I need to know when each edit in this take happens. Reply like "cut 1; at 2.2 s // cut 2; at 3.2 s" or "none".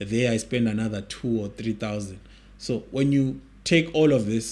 none